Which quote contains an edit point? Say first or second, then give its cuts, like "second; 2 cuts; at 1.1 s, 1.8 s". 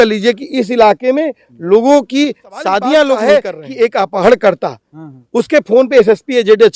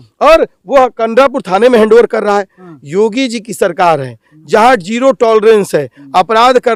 first; 1 cut; at 3.3 s